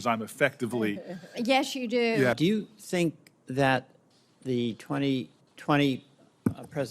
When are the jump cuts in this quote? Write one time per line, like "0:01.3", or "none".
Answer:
0:02.4

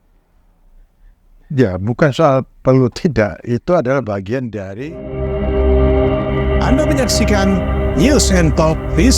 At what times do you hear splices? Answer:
0:04.6

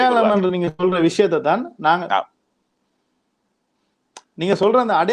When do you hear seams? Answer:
none

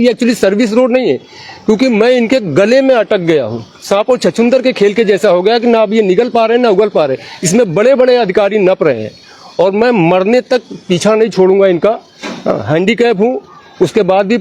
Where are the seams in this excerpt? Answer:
none

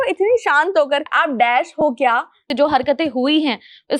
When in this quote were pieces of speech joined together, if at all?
0:01.1
0:02.5

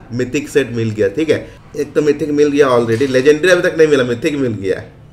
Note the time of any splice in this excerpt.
0:01.6

